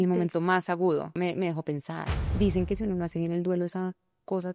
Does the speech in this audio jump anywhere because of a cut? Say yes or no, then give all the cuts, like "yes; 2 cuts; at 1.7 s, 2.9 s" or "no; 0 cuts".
yes; 2 cuts; at 1.1 s, 2.2 s